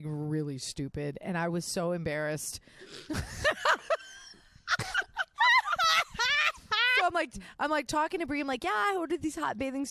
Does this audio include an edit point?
no; 0 cuts

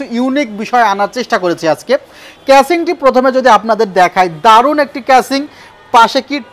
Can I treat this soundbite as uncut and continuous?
yes; 0 cuts

